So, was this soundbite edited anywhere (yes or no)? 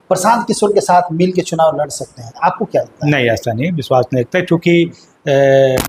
no